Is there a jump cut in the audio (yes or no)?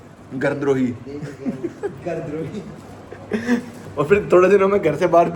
no